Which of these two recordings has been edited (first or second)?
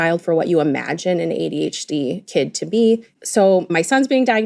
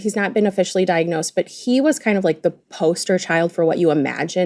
first